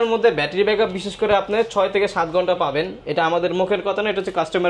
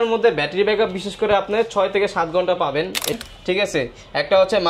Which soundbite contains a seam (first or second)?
second